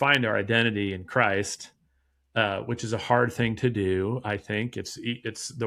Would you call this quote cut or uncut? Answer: uncut